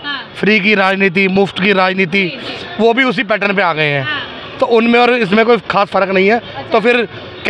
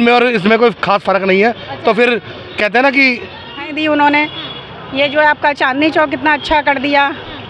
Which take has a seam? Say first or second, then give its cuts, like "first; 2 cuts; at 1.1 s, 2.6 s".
second; 1 cut; at 3.7 s